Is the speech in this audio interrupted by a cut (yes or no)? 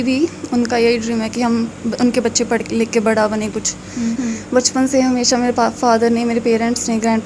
yes